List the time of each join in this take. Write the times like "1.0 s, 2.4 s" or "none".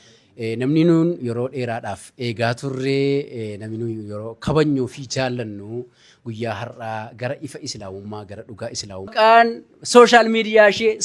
9.1 s